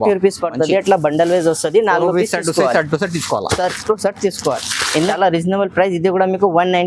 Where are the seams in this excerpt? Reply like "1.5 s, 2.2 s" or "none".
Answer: 5.1 s